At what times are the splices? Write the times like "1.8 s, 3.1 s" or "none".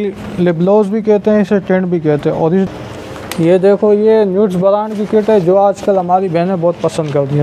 2.7 s